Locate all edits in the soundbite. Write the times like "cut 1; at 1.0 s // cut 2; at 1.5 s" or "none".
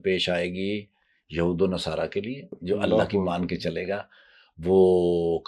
cut 1; at 2.5 s

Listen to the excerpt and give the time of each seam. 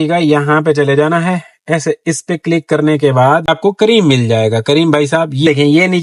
cut 1; at 3.5 s

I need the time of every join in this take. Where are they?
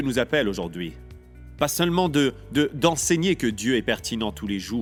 none

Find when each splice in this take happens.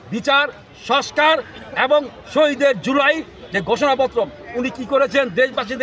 none

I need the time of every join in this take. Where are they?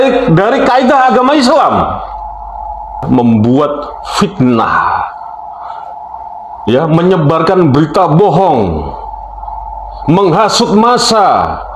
cut 1; at 3.0 s

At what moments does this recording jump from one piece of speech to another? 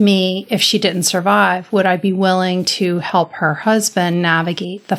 none

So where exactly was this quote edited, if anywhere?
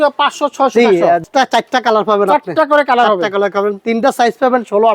cut 1; at 1.2 s // cut 2; at 3.8 s

